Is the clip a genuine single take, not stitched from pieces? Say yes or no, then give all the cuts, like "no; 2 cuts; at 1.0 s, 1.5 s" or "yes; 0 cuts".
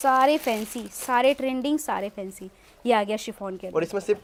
yes; 0 cuts